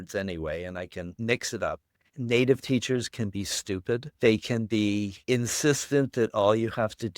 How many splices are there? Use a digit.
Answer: 4